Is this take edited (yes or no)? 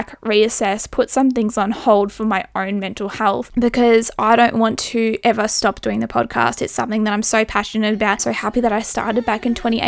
yes